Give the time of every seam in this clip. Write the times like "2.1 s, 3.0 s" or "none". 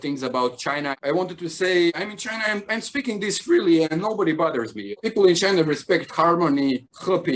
1.0 s